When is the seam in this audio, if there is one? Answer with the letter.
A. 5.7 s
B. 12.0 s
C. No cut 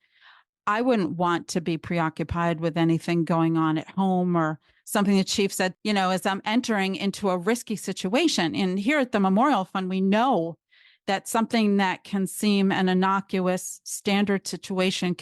A